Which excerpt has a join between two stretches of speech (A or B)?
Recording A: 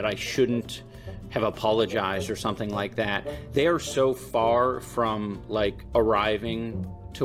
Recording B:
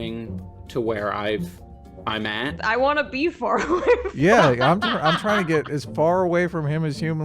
B